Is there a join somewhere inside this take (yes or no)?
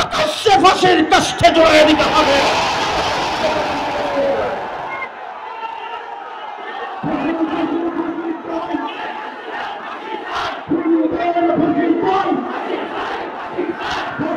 no